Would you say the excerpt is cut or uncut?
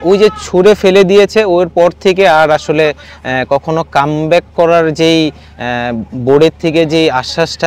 uncut